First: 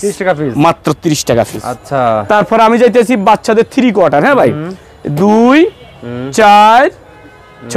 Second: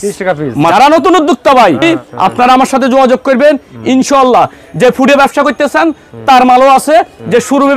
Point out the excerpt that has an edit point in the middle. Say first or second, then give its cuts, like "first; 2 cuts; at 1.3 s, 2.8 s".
second; 2 cuts; at 0.7 s, 1.8 s